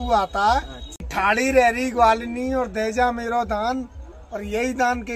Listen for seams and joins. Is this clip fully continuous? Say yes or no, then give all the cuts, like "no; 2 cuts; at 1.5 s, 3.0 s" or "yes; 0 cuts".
no; 1 cut; at 1.1 s